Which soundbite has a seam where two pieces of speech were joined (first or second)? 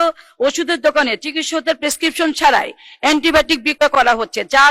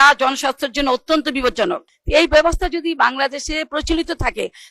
second